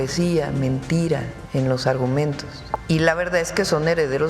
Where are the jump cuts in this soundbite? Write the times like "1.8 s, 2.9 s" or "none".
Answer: 1.4 s, 2.8 s